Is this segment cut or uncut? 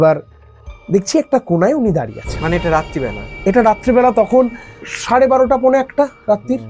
cut